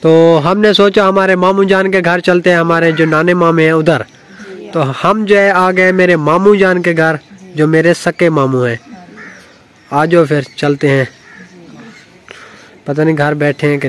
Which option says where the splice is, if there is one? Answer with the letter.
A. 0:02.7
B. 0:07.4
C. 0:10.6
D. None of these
D